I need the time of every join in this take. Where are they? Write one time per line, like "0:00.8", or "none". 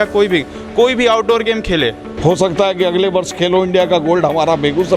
0:02.1

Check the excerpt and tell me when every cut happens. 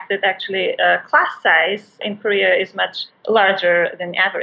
0:02.0

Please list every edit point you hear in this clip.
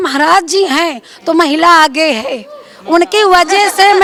none

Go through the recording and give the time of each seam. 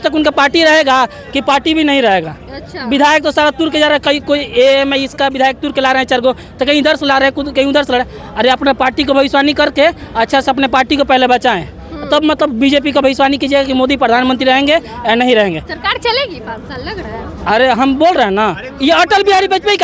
none

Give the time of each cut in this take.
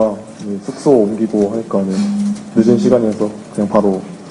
0:01.9

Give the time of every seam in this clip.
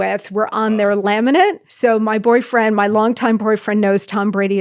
0:01.7

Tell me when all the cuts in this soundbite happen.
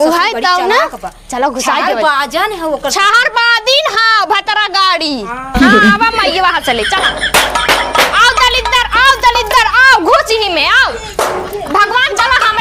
none

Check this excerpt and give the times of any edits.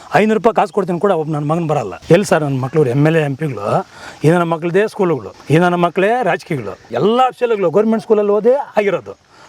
0:01.9
0:05.3
0:06.9

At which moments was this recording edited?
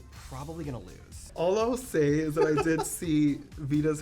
0:01.3

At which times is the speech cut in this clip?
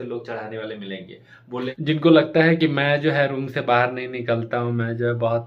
0:01.7

